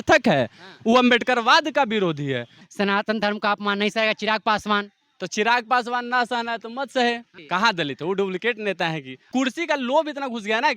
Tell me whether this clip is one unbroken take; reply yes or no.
no